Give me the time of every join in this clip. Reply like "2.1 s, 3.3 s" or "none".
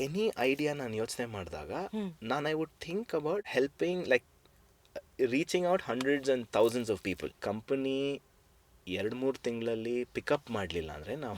3.5 s, 7.3 s

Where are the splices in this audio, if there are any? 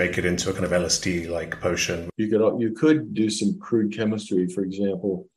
2.0 s

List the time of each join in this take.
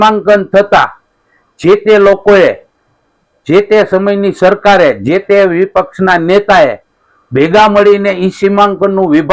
none

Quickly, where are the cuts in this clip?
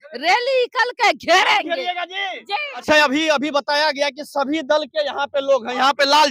2.8 s

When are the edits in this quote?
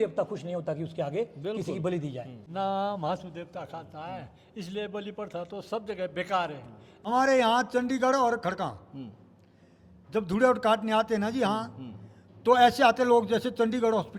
2.4 s, 7.1 s

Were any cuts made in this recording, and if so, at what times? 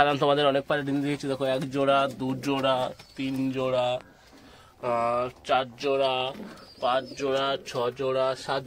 none

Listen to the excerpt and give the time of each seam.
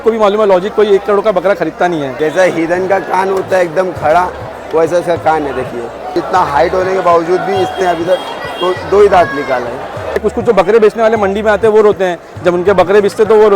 2.1 s, 6.2 s, 10.2 s

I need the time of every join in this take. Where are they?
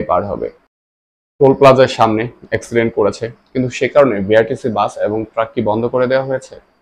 1.0 s

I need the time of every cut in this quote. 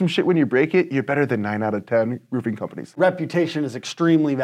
3.0 s

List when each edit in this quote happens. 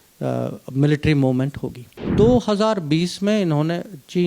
2.1 s

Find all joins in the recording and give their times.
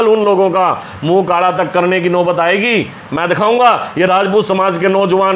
none

